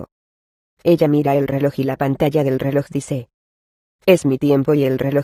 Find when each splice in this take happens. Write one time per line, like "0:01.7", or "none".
none